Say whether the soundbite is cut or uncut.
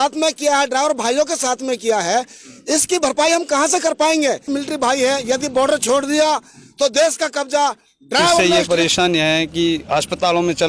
cut